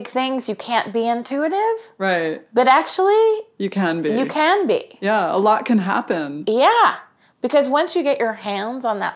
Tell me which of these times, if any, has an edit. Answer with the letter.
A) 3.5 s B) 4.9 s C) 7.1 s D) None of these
D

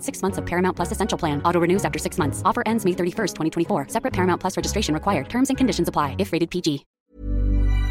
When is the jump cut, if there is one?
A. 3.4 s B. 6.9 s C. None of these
B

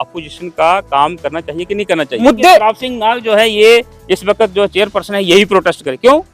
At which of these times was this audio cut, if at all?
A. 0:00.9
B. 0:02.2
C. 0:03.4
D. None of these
B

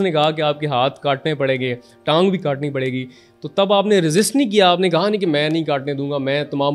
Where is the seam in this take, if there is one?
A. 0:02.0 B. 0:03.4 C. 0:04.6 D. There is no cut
D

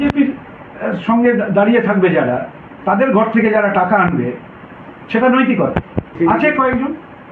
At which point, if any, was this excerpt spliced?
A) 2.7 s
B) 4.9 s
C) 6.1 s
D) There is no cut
C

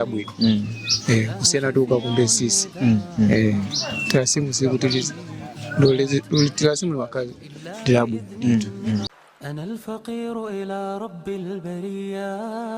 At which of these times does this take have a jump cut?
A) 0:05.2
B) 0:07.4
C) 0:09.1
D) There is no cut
C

